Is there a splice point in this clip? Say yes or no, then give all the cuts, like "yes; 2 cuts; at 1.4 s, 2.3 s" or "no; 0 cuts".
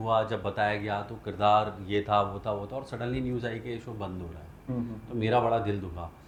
no; 0 cuts